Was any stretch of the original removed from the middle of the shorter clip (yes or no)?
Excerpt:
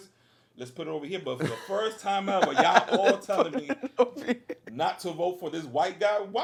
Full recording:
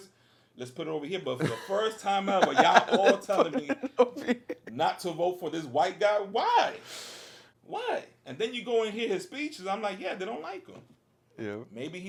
no